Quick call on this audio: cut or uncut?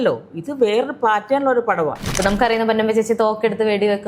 cut